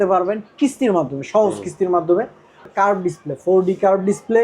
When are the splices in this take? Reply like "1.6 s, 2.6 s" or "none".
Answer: 2.7 s